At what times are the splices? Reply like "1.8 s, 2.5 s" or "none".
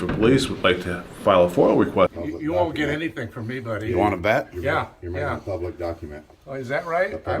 2.2 s